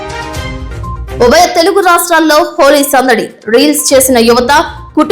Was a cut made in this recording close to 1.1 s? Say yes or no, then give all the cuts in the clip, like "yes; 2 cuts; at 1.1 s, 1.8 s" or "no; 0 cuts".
yes; 1 cut; at 1.1 s